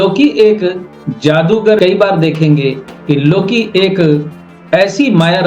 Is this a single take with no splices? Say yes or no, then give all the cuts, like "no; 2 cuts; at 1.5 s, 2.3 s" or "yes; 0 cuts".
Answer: no; 1 cut; at 1.8 s